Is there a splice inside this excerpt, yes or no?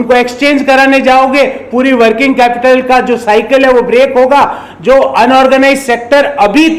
no